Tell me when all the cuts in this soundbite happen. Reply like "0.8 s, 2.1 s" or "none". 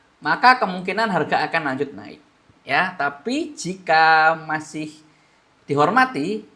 none